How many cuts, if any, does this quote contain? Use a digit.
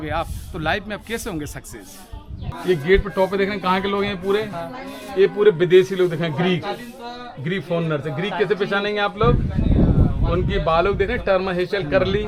1